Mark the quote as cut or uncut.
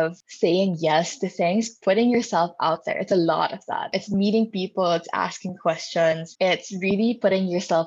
cut